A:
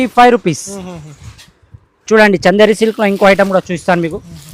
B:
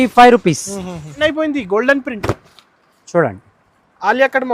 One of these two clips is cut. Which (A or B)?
B